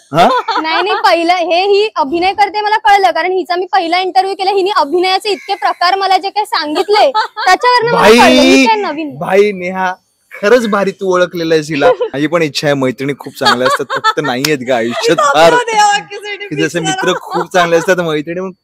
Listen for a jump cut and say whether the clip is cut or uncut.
cut